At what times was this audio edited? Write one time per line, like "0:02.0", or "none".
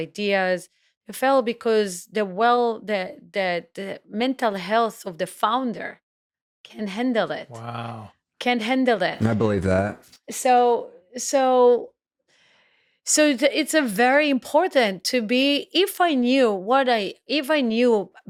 none